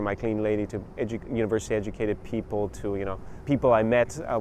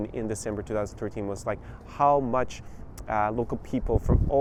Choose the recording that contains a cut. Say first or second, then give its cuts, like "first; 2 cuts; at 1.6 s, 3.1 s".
first; 1 cut; at 3.3 s